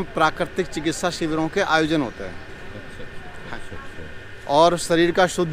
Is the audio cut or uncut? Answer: cut